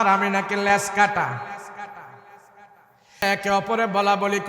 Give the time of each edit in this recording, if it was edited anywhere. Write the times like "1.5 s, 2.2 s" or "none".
3.2 s